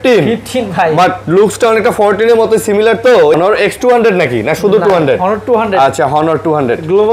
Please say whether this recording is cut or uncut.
cut